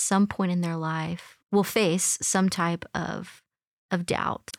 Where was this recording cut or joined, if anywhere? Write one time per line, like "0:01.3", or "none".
none